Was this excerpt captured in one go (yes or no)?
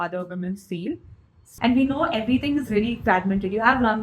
no